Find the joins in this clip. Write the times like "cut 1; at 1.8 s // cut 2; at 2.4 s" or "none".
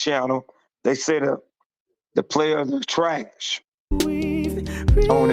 cut 1; at 3.6 s